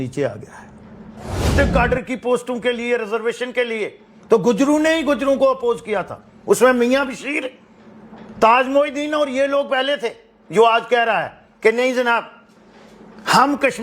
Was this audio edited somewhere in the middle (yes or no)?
yes